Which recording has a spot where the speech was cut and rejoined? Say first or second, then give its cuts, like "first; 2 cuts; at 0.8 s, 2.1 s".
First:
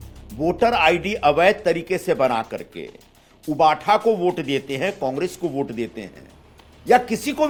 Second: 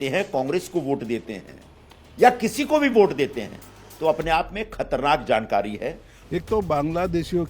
second; 1 cut; at 6.1 s